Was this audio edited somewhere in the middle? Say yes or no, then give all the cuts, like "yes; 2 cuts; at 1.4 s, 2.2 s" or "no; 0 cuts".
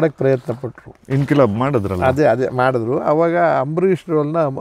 no; 0 cuts